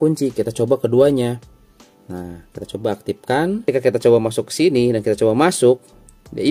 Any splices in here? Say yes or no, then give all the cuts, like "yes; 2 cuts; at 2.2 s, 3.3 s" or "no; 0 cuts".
yes; 1 cut; at 3.7 s